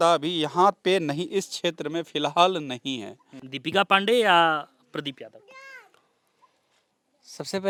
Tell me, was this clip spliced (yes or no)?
no